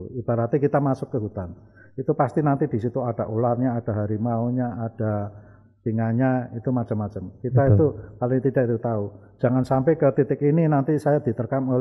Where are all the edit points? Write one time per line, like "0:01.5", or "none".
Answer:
none